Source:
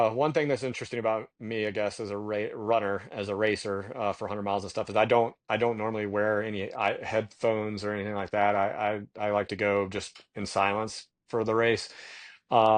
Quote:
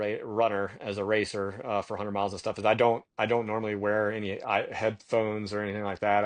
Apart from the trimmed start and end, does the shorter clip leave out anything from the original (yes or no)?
no